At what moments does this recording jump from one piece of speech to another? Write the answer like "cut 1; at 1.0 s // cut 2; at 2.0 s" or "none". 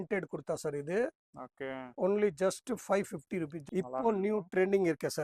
cut 1; at 3.6 s

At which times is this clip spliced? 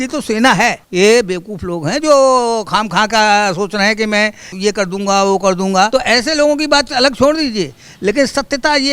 cut 1; at 0.8 s // cut 2; at 4.4 s // cut 3; at 5.9 s

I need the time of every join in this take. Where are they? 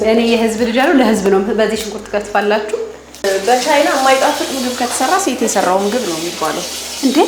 cut 1; at 3.2 s

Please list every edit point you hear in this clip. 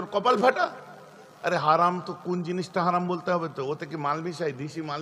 cut 1; at 1.2 s

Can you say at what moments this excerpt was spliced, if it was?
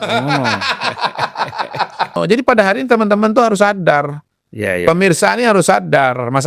cut 1; at 2.1 s

